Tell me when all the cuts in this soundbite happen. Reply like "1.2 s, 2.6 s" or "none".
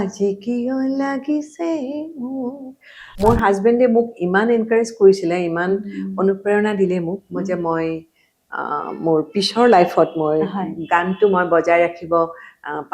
3.0 s

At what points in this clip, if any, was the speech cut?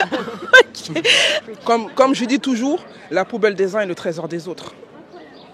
1.5 s

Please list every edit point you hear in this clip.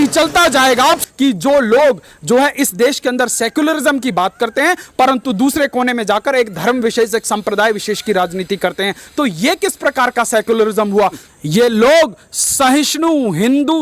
1.0 s, 11.2 s

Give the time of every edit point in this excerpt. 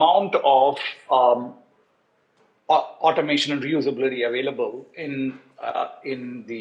none

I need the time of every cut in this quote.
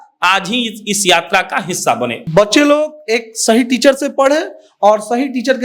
2.2 s

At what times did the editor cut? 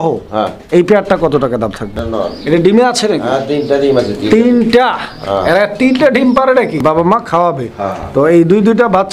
2.0 s, 6.8 s

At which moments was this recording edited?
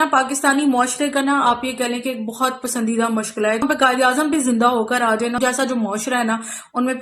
3.6 s, 5.4 s

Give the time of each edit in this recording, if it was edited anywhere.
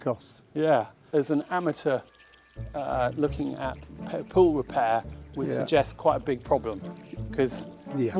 1.0 s

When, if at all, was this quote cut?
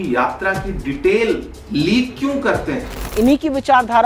3.0 s

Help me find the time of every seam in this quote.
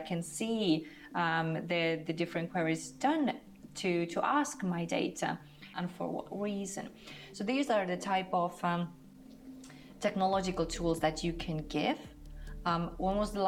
5.7 s

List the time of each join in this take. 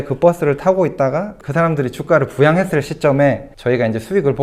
none

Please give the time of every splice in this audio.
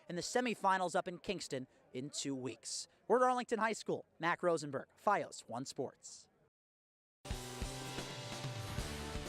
7.2 s

